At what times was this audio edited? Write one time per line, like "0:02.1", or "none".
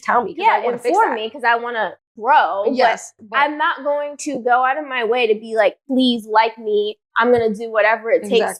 none

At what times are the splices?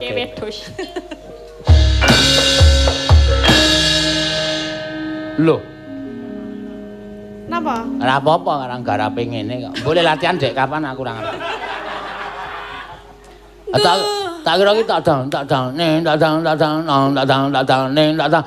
0:01.6

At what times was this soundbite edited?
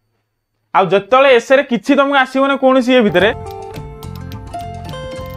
0:03.4

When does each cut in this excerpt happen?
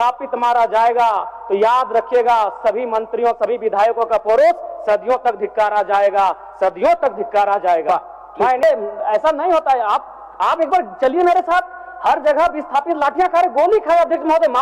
0:08.6

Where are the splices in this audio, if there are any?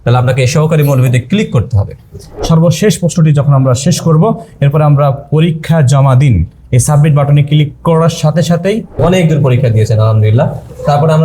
0:02.3
0:09.0

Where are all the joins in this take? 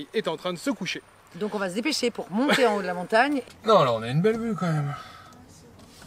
0:03.4

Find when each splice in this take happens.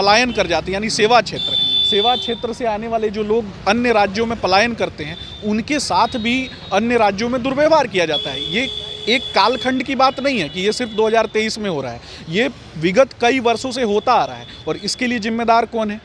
none

